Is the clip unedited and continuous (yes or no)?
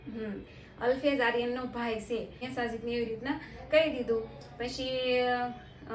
no